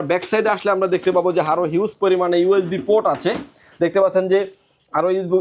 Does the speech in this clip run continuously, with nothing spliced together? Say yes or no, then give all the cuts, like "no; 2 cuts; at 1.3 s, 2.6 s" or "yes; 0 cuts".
yes; 0 cuts